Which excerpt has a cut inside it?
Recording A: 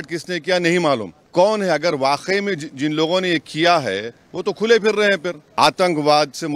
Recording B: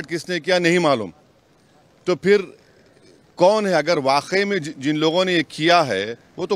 A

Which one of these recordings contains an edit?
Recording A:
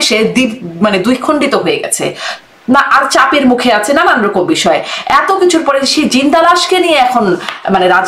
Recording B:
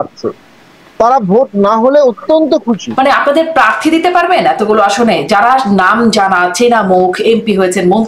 B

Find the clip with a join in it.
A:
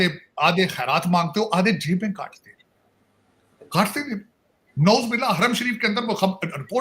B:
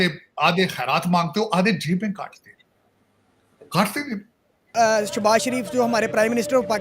B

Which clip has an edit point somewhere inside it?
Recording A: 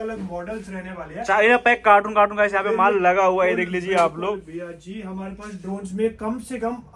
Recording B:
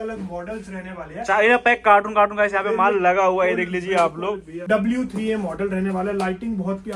B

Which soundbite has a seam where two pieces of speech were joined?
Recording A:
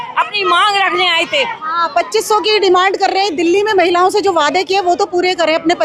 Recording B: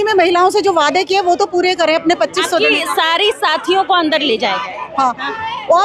A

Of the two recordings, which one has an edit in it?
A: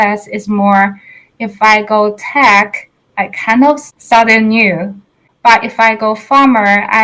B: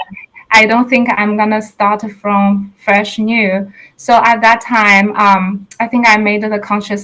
A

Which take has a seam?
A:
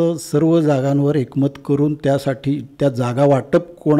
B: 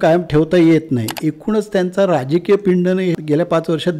B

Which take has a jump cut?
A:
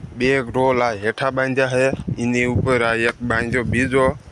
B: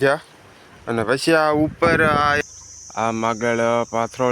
B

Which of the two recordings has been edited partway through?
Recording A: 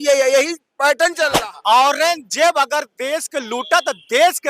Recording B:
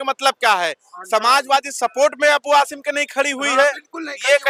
A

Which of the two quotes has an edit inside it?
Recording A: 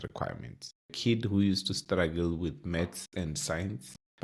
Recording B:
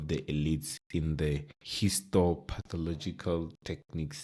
A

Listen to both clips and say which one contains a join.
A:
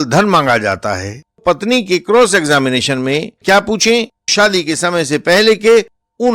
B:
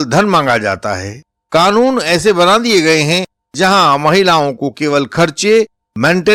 A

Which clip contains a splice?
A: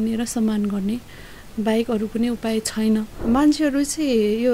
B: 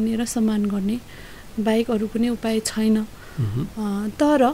A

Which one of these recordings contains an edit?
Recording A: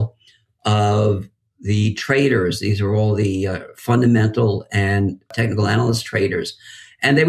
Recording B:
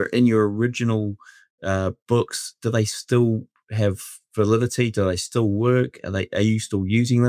A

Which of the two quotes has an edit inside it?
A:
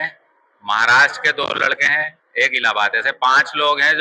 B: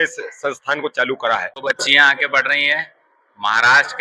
B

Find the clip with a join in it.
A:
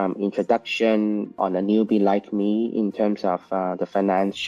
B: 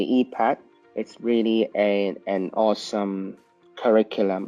A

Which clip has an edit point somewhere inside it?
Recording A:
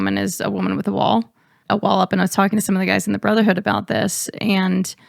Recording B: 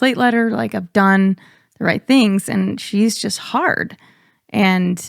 A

